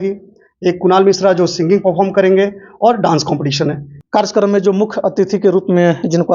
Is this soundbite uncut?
no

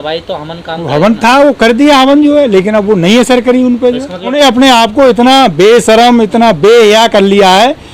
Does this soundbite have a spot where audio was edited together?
yes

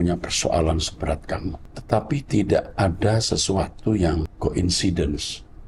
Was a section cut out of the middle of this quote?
yes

